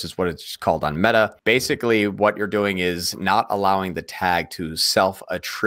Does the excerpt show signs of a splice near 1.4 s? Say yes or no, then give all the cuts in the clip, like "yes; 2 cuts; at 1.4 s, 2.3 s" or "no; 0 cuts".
yes; 1 cut; at 1.4 s